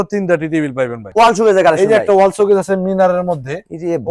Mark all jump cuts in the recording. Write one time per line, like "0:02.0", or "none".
0:01.0